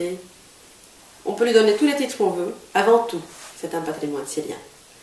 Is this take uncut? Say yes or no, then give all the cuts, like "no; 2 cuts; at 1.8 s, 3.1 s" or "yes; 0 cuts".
no; 1 cut; at 2.6 s